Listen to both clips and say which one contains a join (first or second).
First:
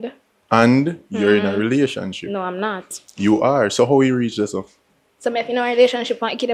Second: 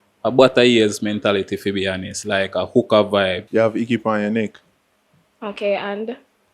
second